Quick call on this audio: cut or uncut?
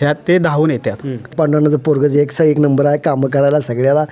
cut